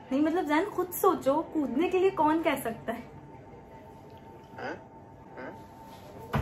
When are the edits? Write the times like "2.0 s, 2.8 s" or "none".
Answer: 5.3 s